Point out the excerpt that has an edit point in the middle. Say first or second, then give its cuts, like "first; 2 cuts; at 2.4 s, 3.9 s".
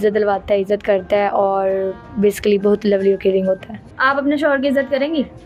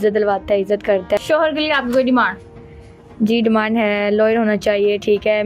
second; 1 cut; at 1.2 s